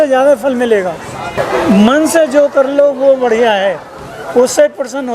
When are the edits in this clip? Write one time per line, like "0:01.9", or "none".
0:01.4